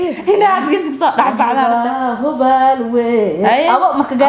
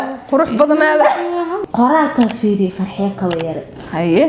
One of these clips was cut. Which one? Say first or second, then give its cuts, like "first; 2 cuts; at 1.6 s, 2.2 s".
second; 1 cut; at 1.6 s